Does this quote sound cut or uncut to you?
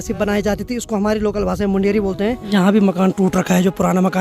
cut